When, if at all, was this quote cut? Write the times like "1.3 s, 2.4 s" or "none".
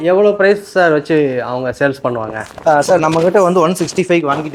none